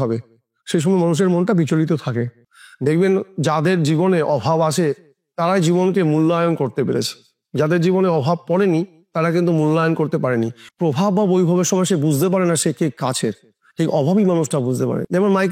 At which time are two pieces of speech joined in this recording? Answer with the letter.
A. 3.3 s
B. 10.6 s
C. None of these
B